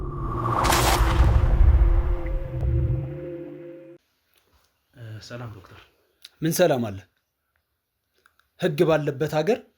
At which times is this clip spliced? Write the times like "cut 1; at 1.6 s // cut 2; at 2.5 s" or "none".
cut 1; at 4.1 s